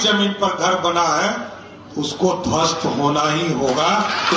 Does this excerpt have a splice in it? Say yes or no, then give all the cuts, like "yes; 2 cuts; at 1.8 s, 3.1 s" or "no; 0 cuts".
no; 0 cuts